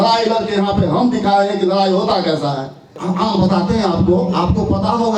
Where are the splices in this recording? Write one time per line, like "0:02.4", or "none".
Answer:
0:02.8